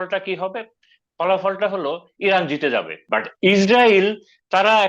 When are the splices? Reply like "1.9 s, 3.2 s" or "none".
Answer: 3.0 s